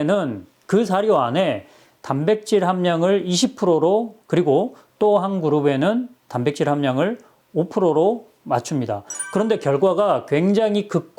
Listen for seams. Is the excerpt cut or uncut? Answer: cut